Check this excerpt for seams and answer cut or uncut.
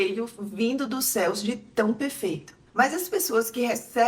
cut